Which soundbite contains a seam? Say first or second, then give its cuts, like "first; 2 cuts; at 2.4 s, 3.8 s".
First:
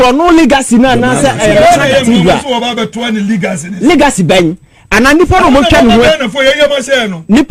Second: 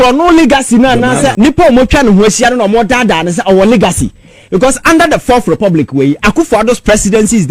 second; 1 cut; at 1.3 s